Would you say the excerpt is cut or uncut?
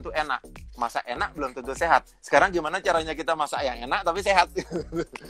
uncut